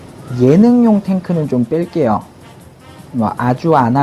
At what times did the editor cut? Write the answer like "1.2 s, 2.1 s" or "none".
1.6 s